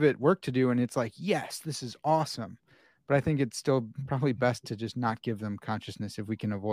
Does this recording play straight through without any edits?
yes; 0 cuts

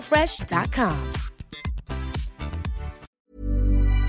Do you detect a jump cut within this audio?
yes; 1 cut; at 2.9 s

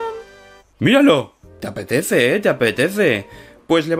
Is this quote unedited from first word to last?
yes; 0 cuts

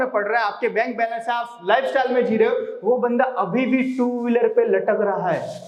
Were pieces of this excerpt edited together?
no; 0 cuts

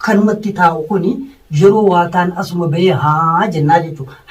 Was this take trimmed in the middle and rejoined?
no; 0 cuts

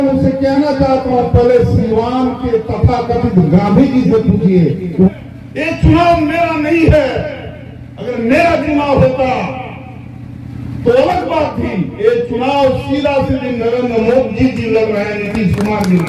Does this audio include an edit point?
yes; 1 cut; at 5.1 s

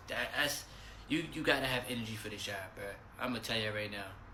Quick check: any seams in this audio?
no; 0 cuts

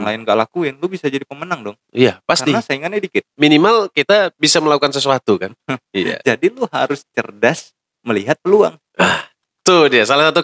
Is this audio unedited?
yes; 0 cuts

